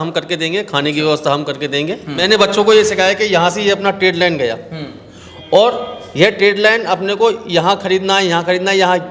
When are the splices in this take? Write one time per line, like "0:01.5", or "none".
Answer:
0:02.1